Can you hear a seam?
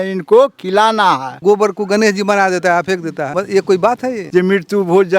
yes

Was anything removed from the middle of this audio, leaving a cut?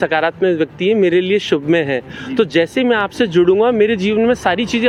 no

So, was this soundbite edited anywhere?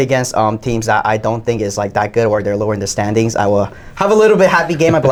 no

